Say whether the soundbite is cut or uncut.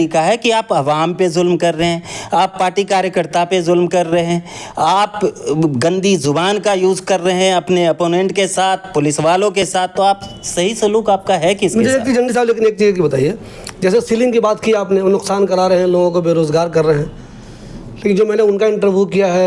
uncut